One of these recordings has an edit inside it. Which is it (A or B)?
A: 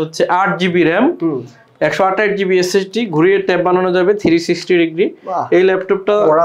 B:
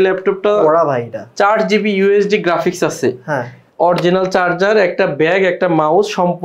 B